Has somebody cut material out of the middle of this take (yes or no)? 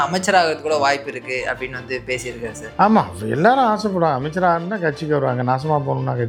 no